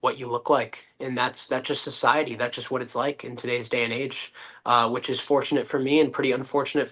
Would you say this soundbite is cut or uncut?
uncut